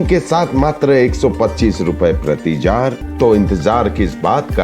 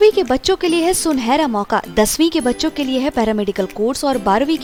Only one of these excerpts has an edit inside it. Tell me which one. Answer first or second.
first